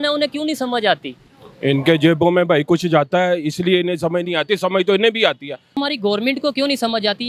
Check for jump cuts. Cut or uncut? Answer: cut